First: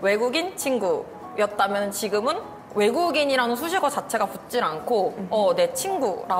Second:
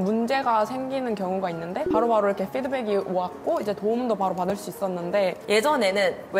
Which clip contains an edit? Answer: second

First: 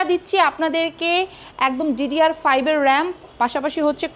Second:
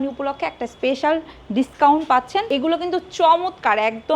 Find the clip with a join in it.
second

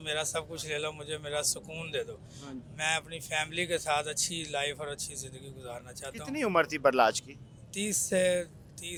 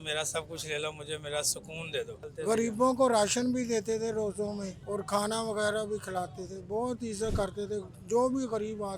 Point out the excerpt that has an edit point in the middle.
second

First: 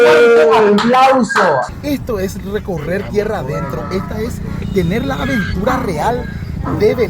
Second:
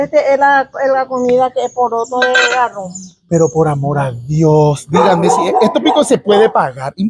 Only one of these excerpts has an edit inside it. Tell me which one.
first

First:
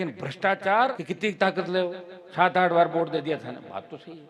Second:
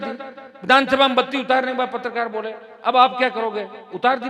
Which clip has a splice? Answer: first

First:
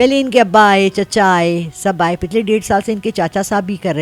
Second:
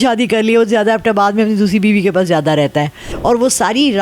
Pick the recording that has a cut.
second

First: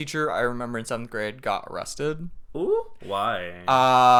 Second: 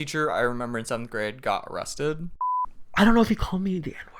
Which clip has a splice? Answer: second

